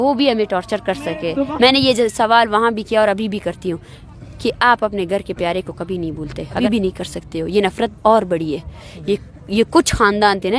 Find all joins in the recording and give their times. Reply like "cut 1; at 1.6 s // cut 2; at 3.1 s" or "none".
cut 1; at 1.5 s // cut 2; at 6.6 s